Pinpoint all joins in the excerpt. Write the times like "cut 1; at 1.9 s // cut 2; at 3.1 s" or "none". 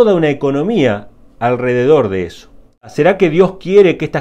cut 1; at 2.9 s